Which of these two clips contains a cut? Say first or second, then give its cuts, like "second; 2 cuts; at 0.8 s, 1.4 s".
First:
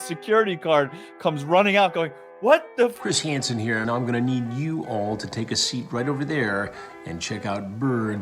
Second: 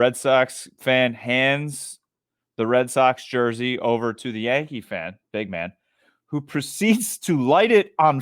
first; 1 cut; at 3.0 s